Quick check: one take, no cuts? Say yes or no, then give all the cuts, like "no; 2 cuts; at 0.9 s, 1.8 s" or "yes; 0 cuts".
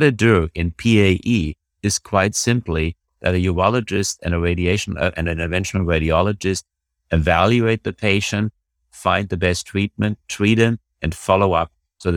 yes; 0 cuts